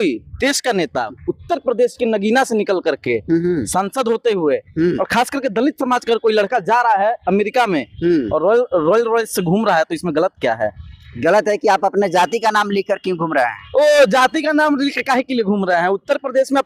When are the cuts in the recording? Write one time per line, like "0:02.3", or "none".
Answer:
none